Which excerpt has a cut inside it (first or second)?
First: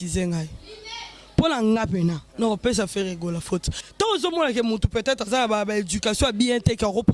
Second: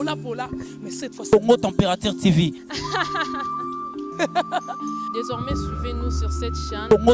first